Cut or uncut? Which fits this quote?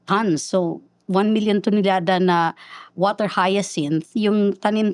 uncut